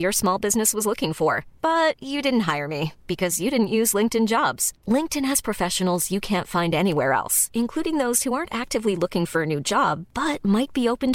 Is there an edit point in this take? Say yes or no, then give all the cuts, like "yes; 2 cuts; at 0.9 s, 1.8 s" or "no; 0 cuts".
no; 0 cuts